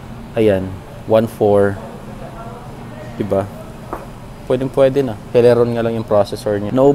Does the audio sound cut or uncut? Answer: uncut